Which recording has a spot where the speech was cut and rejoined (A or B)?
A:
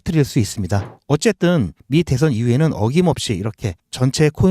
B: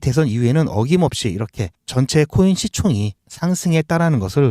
A